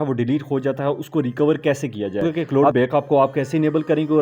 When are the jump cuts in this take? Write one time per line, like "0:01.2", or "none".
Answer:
0:02.4